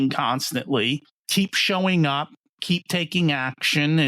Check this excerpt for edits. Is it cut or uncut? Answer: cut